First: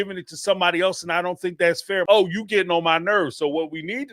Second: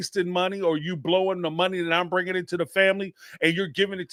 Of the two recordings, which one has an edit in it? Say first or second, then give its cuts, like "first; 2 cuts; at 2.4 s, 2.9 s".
first; 1 cut; at 2.0 s